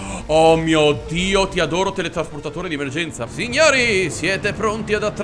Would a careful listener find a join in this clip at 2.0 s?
no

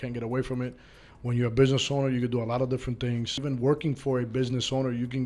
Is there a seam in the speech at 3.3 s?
yes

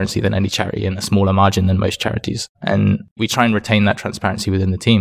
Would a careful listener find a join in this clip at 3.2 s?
yes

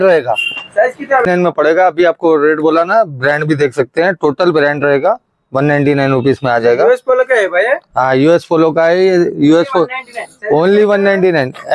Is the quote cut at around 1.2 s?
yes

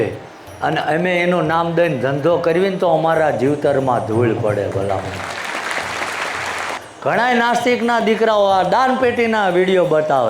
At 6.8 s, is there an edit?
yes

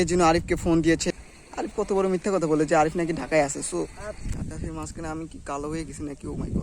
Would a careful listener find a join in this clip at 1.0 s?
yes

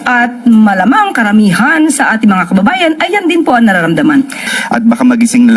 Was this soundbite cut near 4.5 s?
yes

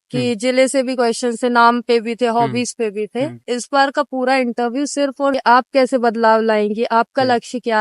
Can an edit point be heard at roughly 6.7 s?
no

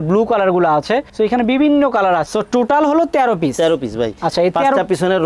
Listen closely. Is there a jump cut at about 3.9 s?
no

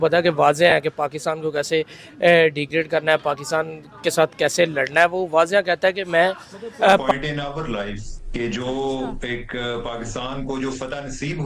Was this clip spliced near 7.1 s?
yes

